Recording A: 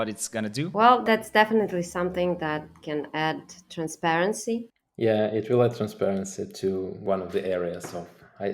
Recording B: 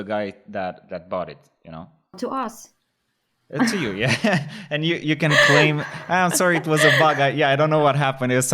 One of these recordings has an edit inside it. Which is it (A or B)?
A